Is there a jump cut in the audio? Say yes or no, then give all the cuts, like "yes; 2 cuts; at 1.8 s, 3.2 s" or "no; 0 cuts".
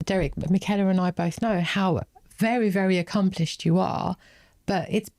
no; 0 cuts